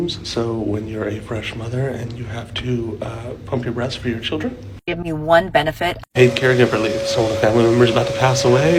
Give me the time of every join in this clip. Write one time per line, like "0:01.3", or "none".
none